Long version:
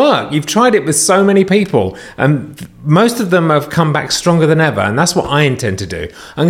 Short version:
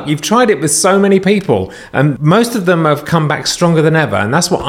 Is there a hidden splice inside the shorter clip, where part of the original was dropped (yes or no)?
yes